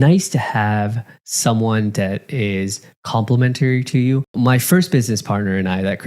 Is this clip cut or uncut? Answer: cut